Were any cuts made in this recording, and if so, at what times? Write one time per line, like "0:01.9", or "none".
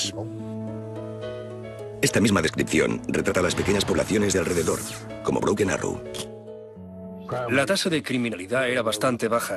none

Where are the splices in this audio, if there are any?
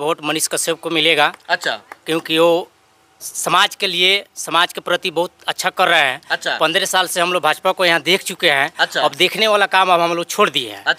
none

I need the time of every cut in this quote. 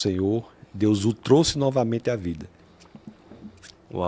none

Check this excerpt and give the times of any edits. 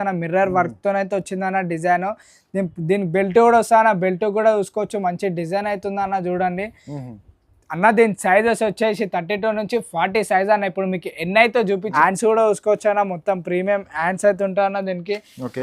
0:11.9

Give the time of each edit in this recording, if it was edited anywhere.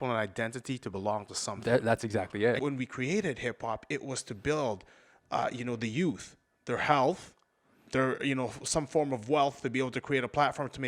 0:02.6

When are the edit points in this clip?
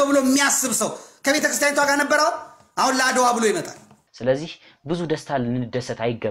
0:04.1

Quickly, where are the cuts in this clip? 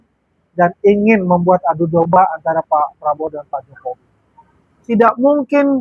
0:04.9

